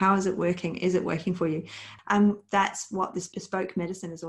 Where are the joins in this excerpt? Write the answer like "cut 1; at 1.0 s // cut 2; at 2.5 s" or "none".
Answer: cut 1; at 1.8 s // cut 2; at 3.3 s